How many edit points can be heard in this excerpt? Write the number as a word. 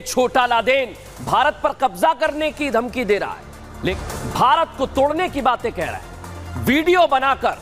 one